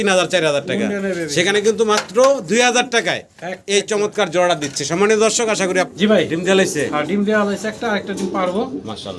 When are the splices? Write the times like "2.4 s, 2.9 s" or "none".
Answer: 5.9 s